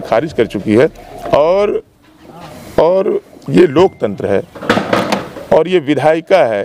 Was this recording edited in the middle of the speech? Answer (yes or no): no